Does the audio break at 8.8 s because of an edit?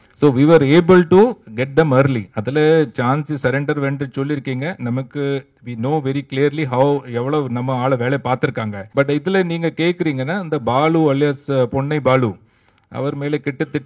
yes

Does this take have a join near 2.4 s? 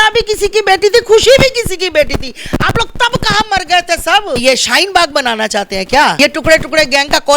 no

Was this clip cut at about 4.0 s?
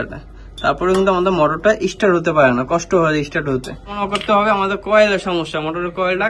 yes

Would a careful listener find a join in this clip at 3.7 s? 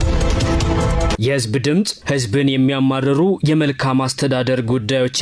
no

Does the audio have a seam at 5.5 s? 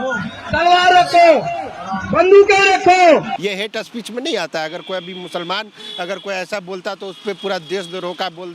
no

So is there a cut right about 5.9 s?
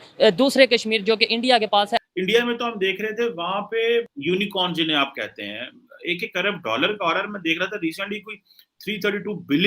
no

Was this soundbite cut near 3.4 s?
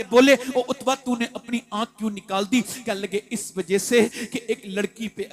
no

